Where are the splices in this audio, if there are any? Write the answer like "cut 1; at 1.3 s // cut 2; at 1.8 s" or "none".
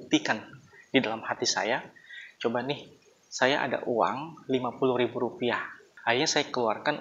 cut 1; at 5.9 s